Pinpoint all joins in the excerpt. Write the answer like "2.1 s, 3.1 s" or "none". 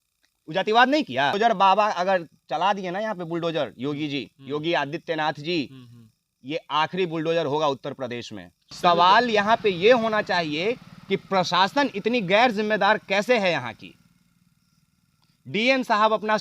1.4 s, 8.8 s